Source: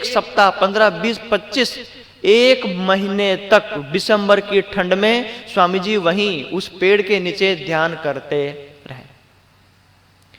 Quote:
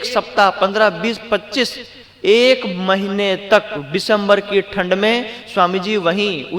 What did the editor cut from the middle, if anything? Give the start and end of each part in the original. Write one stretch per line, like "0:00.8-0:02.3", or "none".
none